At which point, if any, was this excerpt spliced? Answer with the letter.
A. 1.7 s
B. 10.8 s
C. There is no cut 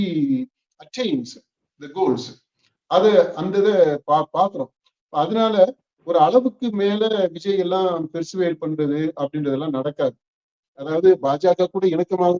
B